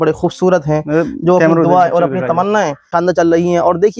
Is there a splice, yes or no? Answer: yes